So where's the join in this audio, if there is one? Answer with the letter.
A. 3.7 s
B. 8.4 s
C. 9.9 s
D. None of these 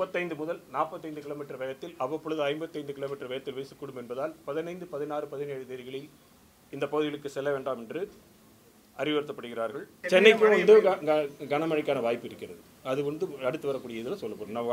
C